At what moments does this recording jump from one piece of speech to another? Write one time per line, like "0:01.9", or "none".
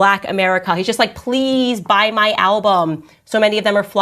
none